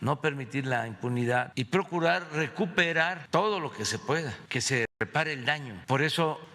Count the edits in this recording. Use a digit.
1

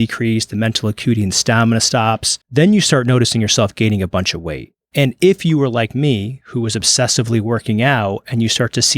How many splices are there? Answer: 1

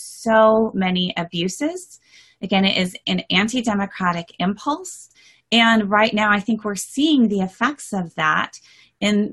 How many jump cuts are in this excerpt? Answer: 0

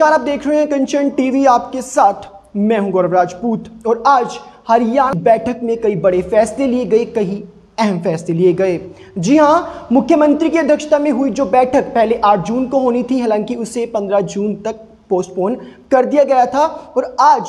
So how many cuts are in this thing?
1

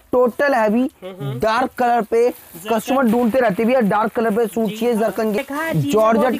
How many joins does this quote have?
1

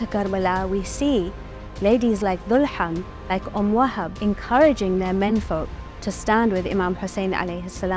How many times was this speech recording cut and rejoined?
1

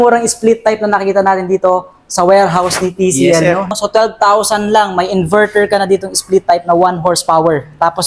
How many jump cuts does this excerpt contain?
1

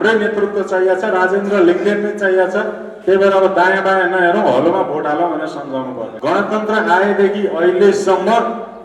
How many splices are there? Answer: 1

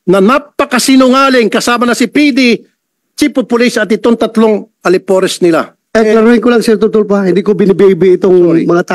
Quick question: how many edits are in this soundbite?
1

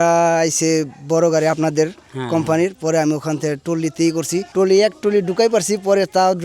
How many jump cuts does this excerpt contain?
1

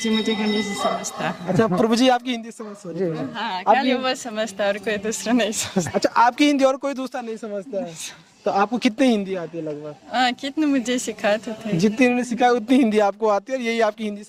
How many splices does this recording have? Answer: 0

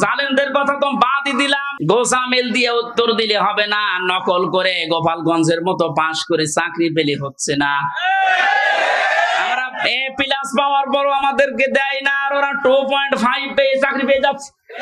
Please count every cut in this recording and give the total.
1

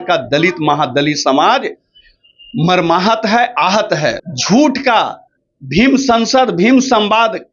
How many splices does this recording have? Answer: 1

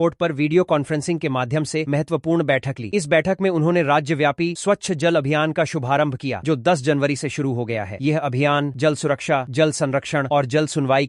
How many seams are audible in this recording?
0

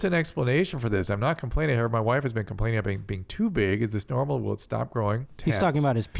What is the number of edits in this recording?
1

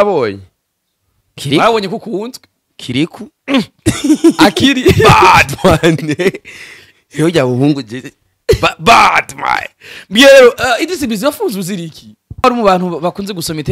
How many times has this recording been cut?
1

